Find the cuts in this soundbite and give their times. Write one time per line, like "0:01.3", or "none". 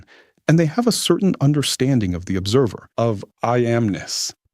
0:02.8